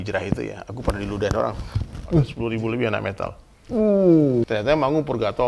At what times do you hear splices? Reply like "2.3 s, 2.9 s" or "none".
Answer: 2.3 s, 4.5 s

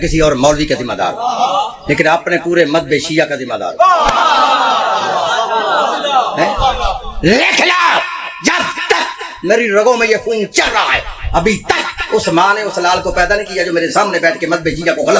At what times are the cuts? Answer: none

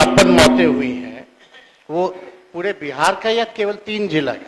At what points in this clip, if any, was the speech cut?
none

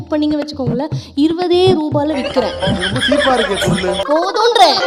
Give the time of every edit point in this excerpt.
none

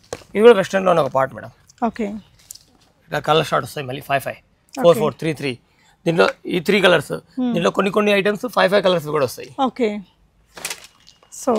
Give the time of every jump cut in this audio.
none

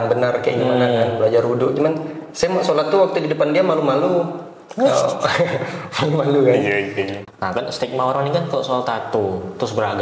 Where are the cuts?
7.2 s

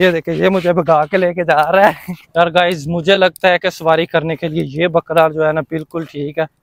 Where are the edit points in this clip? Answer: 2.1 s

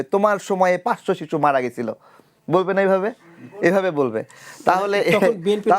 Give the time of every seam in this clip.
none

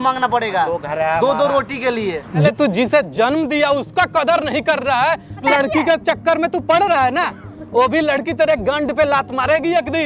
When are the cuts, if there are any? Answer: 2.4 s, 5.4 s

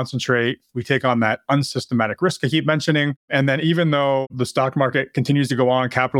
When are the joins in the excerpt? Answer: 3.2 s, 4.3 s

